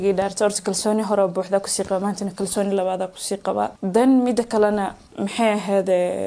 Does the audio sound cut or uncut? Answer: cut